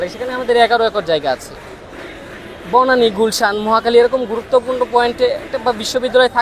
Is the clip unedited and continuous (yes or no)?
yes